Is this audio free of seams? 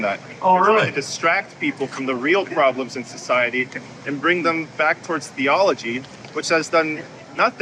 yes; 0 cuts

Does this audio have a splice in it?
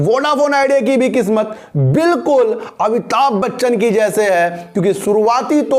no; 0 cuts

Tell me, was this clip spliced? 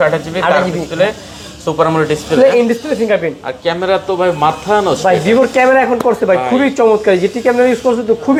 no; 0 cuts

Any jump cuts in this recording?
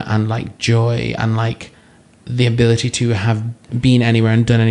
yes; 1 cut; at 3.7 s

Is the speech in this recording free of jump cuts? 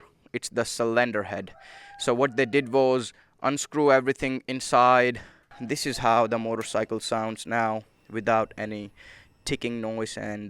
no; 1 cut; at 5.5 s

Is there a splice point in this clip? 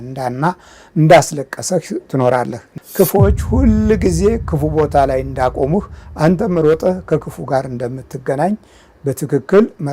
yes; 1 cut; at 2.7 s

